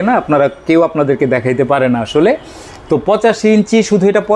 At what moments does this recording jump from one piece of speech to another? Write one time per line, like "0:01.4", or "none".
none